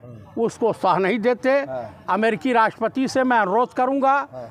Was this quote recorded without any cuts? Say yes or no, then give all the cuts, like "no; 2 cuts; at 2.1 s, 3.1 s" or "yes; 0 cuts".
yes; 0 cuts